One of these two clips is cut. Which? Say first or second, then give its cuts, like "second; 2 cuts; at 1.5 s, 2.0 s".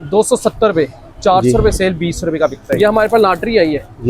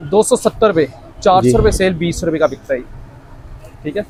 first; 1 cut; at 2.8 s